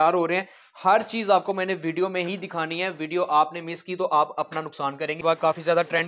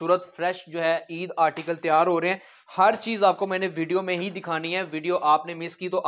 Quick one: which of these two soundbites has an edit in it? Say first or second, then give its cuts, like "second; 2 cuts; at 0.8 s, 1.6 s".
first; 1 cut; at 5.2 s